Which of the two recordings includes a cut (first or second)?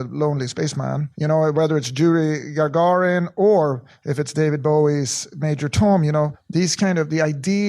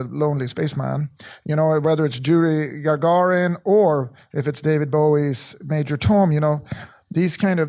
first